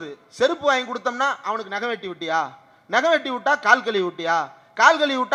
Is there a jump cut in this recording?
no; 0 cuts

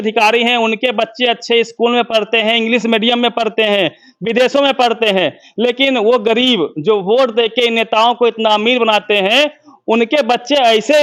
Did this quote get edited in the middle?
no; 0 cuts

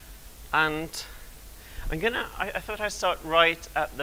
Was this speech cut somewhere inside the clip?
no; 0 cuts

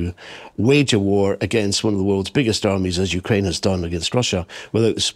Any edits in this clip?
no; 0 cuts

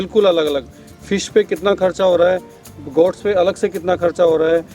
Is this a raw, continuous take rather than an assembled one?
yes; 0 cuts

